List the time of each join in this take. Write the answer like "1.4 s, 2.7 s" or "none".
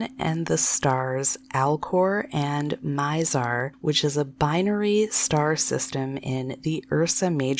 none